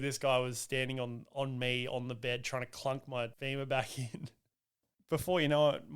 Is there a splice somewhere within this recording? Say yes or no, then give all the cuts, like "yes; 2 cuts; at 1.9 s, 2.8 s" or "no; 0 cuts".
yes; 2 cuts; at 3.4 s, 4.9 s